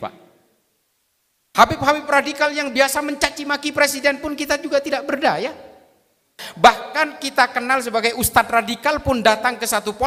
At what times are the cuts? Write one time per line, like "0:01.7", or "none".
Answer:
0:06.4